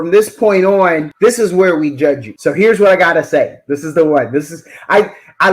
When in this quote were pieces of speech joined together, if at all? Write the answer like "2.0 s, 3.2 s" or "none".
1.1 s, 2.3 s